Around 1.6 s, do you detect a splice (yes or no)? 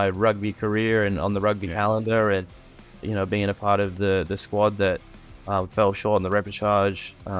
no